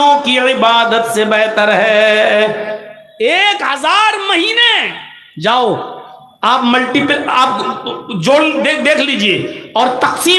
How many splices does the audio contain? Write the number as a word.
zero